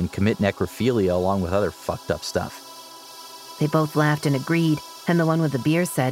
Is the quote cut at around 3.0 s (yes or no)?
yes